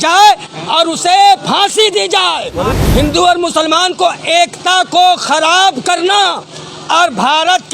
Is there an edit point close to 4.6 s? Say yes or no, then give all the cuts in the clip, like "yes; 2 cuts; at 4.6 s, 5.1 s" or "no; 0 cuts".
no; 1 cut; at 2.7 s